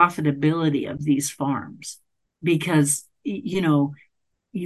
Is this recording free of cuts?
yes; 0 cuts

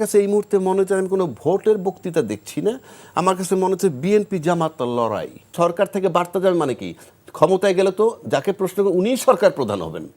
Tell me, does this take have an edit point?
yes; 1 cut; at 5.5 s

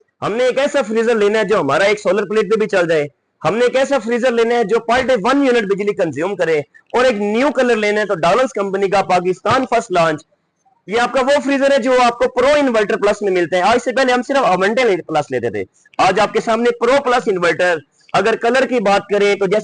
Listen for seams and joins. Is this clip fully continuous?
yes; 0 cuts

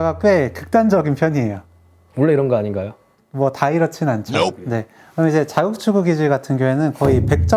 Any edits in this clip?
no; 0 cuts

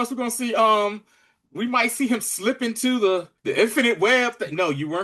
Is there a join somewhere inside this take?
yes; 1 cut; at 3.4 s

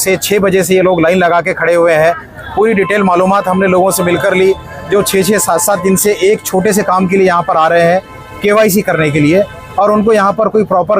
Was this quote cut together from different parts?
no; 0 cuts

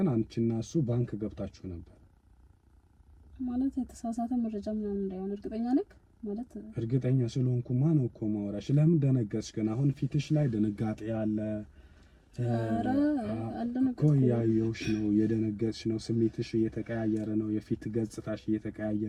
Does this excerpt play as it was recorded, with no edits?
yes; 0 cuts

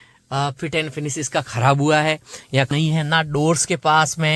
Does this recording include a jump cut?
yes; 1 cut; at 2.7 s

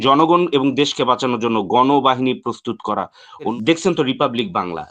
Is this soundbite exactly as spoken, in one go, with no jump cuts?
no; 1 cut; at 3.5 s

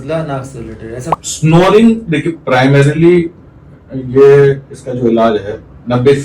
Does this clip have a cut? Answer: yes; 1 cut; at 1.1 s

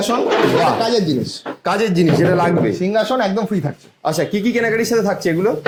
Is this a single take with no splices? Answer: yes; 0 cuts

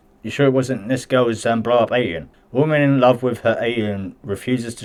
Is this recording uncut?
yes; 0 cuts

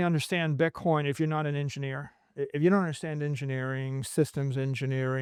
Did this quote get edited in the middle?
no; 0 cuts

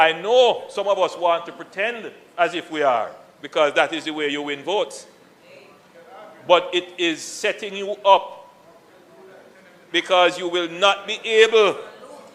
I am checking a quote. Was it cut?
no; 0 cuts

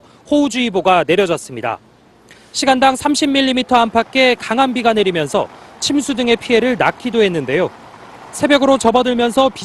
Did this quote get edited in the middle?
no; 0 cuts

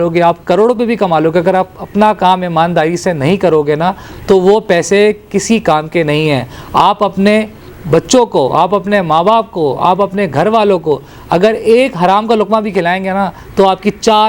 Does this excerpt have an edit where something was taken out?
no; 0 cuts

